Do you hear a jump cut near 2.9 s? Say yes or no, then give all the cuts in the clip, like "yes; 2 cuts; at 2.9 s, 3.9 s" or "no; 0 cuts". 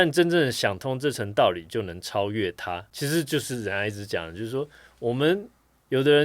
yes; 1 cut; at 2.9 s